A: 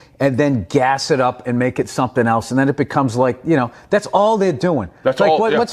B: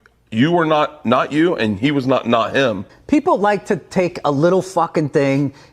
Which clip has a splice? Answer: B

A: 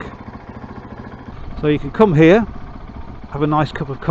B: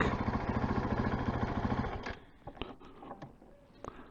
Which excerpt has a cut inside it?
A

